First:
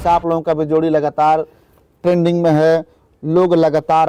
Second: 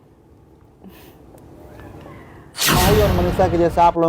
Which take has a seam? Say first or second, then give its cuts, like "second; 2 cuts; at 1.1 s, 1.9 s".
second; 1 cut; at 2.8 s